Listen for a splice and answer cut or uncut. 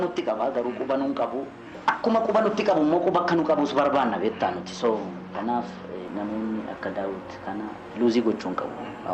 cut